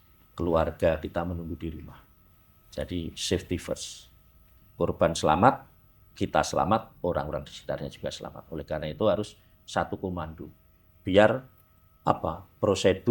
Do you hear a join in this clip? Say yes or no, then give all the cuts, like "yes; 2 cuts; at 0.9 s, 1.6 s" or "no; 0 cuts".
no; 0 cuts